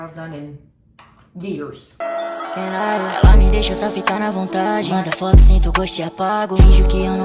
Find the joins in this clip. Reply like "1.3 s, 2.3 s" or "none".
1.8 s